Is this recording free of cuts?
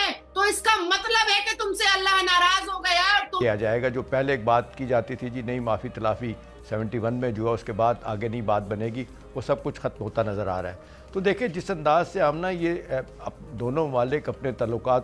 no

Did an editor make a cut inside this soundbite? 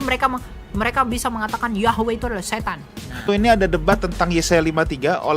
yes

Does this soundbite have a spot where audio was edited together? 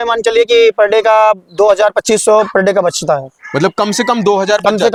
no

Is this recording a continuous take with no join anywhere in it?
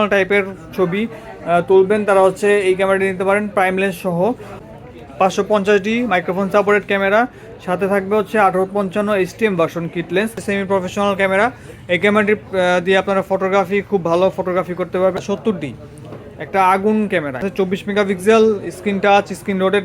no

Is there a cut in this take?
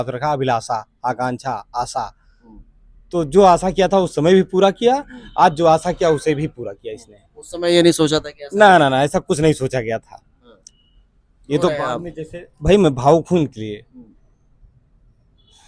no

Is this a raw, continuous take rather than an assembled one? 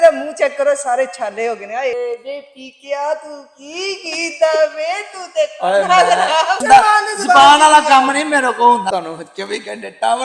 no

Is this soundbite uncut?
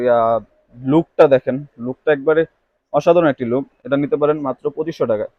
yes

